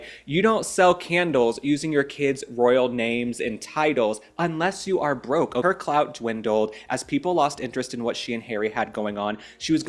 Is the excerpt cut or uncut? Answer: cut